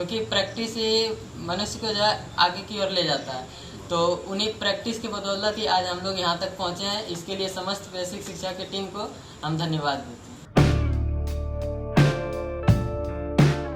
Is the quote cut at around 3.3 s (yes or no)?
no